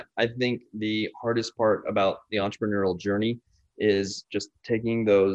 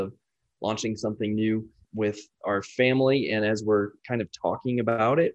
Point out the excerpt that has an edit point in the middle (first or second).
second